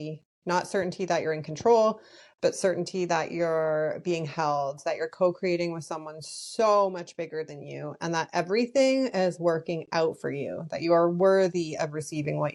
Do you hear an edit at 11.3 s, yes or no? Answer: no